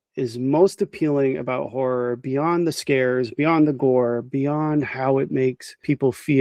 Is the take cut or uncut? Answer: uncut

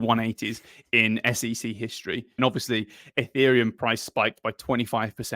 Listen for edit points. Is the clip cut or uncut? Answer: cut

